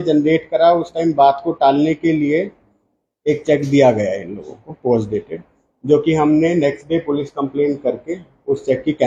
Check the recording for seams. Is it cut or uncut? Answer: uncut